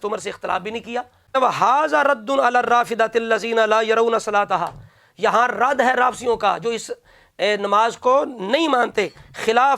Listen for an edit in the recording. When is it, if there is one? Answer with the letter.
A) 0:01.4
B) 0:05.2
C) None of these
A